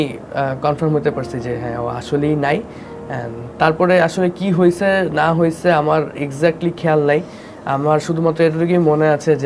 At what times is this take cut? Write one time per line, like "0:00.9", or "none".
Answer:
none